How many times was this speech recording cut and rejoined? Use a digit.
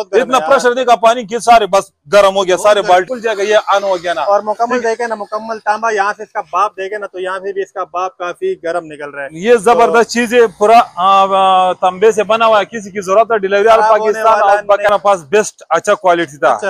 2